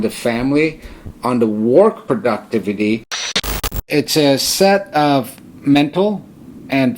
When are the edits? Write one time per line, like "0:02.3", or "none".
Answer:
0:03.4